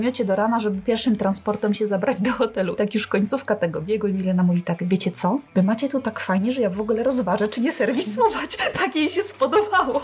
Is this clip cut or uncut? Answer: uncut